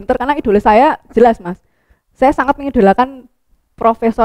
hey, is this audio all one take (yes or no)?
yes